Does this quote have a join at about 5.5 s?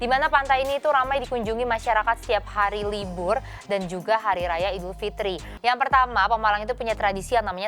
yes; 1 cut; at 5.5 s

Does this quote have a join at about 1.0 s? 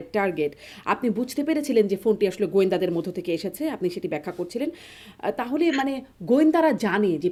no; 0 cuts

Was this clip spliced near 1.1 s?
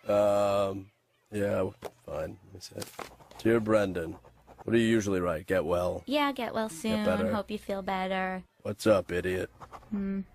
no; 1 cut; at 5.9 s

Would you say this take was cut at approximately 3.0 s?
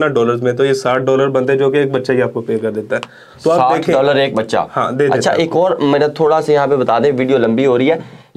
no; 0 cuts

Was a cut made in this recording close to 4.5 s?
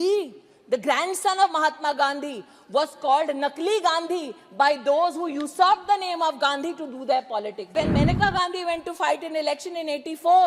no; 1 cut; at 7.7 s

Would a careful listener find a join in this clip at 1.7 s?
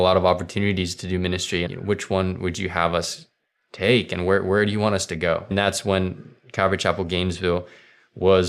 yes; 2 cuts; at 1.7 s, 5.5 s

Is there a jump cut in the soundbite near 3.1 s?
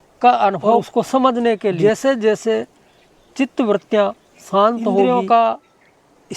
no; 3 cuts; at 0.9 s, 1.8 s, 5.1 s

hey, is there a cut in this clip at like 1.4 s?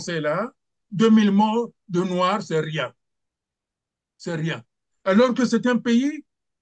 no; 0 cuts

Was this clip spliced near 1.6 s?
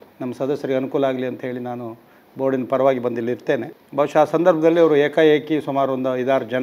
no; 1 cut; at 3.8 s

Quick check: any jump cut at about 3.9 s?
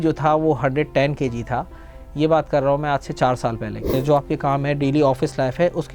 yes; 1 cut; at 3.9 s

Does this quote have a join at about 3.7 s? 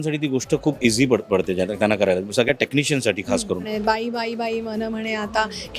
yes; 1 cut; at 3.7 s

